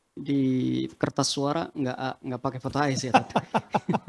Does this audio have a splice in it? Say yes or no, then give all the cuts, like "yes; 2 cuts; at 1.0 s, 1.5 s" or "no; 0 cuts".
no; 0 cuts